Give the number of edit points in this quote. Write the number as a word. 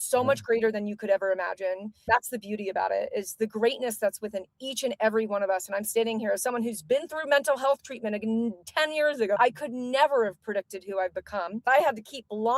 two